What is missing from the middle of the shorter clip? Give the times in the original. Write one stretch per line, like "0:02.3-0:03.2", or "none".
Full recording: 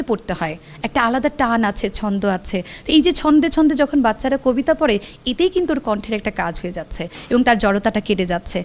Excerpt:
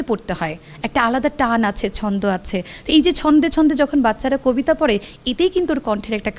none